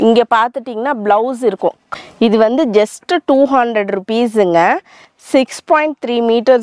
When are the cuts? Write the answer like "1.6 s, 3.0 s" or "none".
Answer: 1.8 s